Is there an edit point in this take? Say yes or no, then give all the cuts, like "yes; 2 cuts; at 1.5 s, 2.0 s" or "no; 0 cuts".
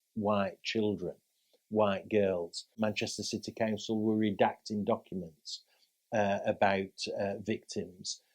yes; 1 cut; at 2.8 s